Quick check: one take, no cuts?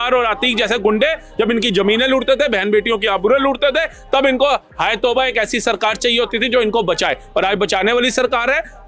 yes; 0 cuts

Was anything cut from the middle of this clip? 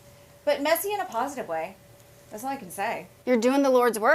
yes; 1 cut; at 3.1 s

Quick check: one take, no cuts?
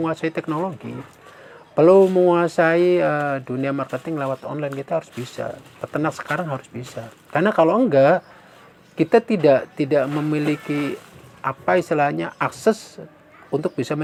yes; 0 cuts

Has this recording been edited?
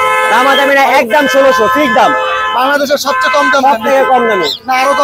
no; 0 cuts

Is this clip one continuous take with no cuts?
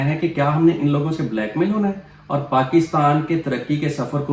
yes; 0 cuts

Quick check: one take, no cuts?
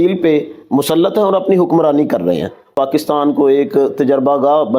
no; 1 cut; at 2.7 s

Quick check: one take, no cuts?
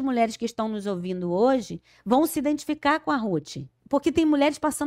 no; 1 cut; at 3.8 s

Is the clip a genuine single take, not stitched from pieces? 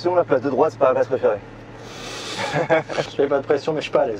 yes; 0 cuts

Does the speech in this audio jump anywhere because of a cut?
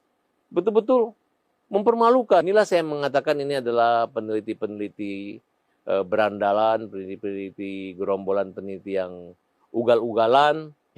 yes; 1 cut; at 2.4 s

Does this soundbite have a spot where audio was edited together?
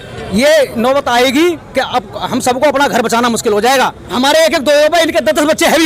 yes; 1 cut; at 4.1 s

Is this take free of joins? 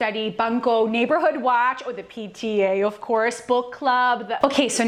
yes; 0 cuts

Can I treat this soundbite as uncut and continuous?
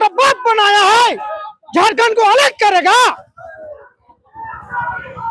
yes; 0 cuts

